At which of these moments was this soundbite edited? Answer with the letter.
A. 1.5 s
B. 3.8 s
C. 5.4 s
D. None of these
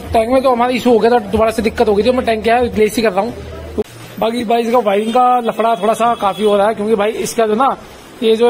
B